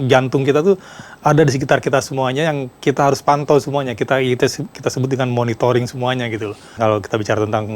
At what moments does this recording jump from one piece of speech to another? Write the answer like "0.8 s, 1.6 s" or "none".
6.7 s